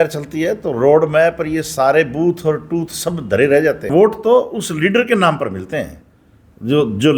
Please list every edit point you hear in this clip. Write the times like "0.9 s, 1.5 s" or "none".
3.9 s